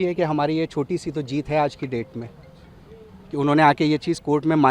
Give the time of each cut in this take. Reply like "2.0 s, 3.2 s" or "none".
none